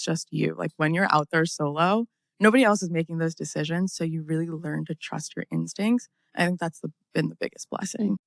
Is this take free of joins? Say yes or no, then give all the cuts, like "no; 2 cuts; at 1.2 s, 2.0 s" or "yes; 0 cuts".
yes; 0 cuts